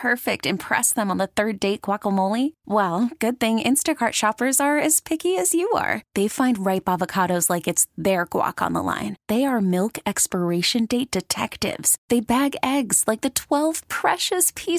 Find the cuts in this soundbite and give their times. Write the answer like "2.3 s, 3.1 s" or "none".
none